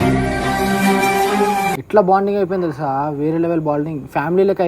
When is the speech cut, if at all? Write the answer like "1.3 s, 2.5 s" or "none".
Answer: 1.8 s